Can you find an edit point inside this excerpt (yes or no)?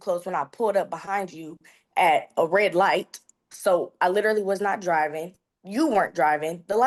no